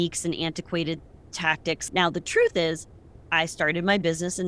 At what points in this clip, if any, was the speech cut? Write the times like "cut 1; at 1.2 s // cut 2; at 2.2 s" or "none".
cut 1; at 1.8 s